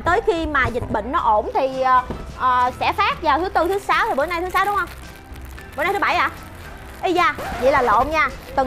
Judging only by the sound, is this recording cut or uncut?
uncut